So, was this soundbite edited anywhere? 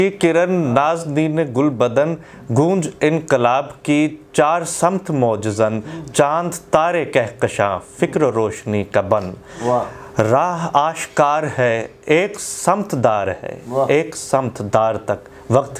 no; 0 cuts

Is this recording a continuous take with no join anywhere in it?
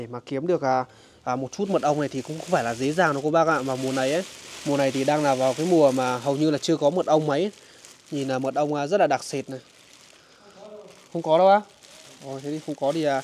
yes; 0 cuts

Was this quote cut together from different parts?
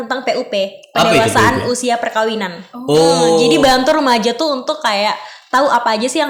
no; 0 cuts

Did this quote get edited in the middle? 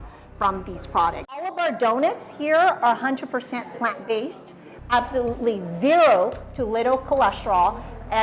yes; 2 cuts; at 1.6 s, 4.7 s

